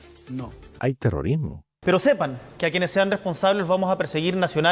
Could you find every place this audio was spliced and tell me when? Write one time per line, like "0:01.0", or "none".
0:01.8